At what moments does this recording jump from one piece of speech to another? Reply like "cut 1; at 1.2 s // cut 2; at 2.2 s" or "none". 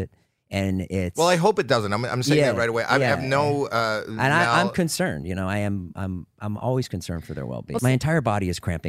cut 1; at 7.8 s